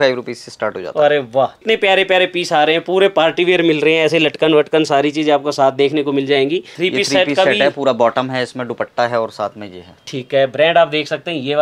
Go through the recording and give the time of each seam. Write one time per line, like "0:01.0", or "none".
0:01.6
0:06.7